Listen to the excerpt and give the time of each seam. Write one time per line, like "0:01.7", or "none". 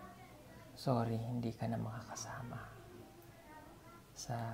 0:03.3